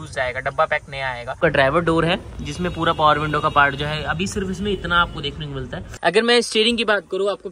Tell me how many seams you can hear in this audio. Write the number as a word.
two